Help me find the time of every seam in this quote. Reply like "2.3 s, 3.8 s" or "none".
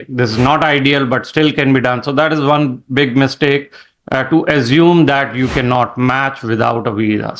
none